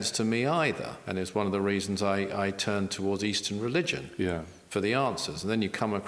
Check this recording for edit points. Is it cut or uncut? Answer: cut